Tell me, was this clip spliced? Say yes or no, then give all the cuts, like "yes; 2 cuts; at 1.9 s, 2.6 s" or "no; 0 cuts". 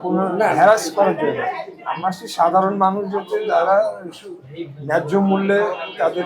no; 0 cuts